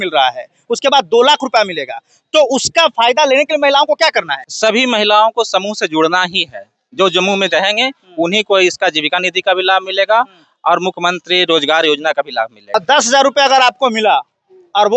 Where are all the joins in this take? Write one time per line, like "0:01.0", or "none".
0:04.4
0:12.8